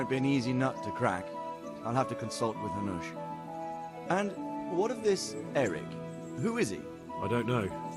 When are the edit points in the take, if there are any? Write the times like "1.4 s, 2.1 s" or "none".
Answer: 3.5 s